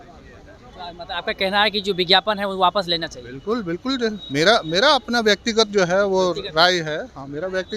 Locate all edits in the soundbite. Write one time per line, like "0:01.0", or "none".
none